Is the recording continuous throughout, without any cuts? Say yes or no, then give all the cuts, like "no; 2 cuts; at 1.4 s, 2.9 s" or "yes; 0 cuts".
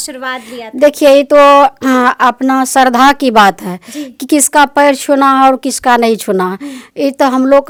yes; 0 cuts